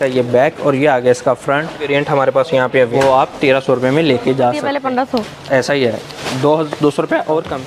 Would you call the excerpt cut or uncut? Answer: cut